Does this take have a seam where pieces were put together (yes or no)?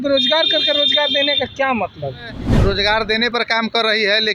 yes